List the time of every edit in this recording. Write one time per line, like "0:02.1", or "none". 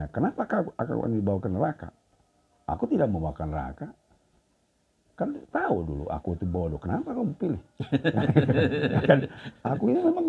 none